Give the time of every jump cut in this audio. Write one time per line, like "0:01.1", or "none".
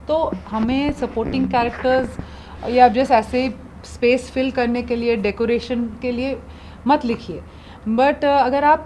none